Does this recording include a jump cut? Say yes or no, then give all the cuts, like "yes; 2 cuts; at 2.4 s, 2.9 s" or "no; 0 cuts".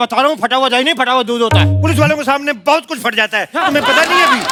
no; 0 cuts